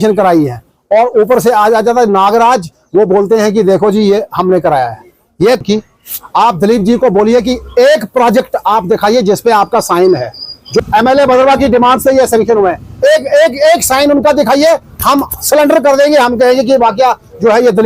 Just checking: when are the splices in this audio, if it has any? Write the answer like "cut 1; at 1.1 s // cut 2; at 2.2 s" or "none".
cut 1; at 5.6 s // cut 2; at 10.8 s